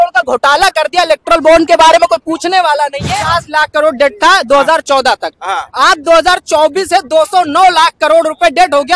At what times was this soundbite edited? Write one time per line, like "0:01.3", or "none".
0:03.1